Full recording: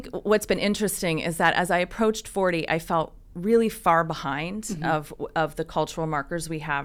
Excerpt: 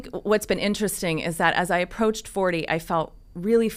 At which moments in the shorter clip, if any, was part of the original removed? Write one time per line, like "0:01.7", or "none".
none